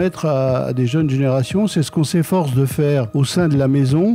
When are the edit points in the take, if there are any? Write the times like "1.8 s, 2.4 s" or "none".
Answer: none